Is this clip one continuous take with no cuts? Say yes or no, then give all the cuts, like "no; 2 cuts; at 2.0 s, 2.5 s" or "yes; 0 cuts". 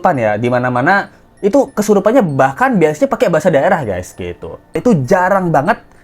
yes; 0 cuts